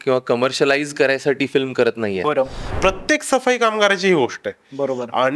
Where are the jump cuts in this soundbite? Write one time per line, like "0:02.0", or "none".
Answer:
0:02.6